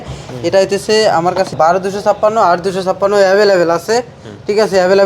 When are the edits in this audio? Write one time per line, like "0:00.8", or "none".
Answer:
0:01.5